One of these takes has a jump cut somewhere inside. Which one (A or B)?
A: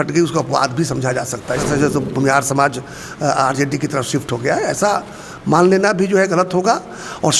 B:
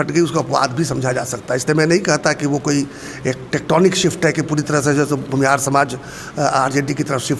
A